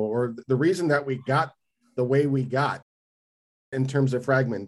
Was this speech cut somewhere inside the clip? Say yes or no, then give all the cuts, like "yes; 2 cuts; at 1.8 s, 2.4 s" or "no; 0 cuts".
no; 0 cuts